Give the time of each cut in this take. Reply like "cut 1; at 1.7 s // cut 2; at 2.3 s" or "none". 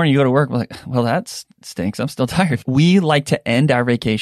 cut 1; at 2.6 s